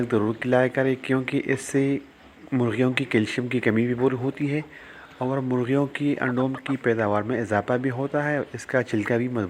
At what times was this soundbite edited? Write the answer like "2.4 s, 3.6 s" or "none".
none